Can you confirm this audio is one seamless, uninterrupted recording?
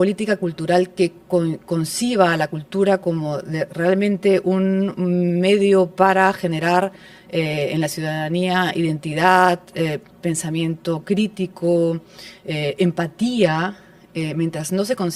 yes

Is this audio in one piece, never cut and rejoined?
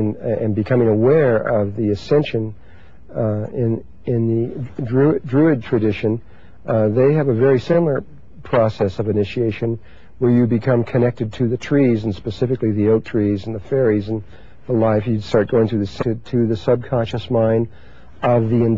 yes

